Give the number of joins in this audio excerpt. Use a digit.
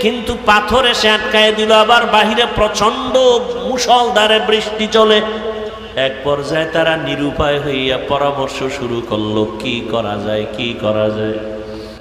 1